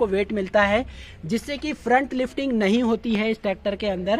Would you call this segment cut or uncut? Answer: uncut